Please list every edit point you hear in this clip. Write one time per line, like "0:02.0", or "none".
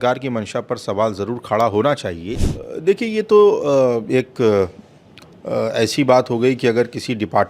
0:02.3